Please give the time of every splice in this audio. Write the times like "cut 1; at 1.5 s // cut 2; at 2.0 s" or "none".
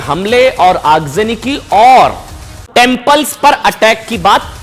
cut 1; at 2.6 s